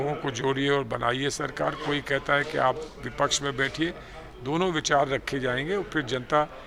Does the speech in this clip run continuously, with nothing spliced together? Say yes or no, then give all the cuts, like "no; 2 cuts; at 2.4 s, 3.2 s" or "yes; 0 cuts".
yes; 0 cuts